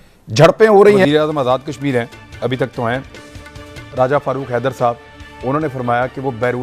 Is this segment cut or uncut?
cut